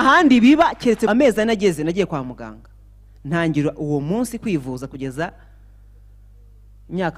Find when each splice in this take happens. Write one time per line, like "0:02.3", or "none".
0:01.1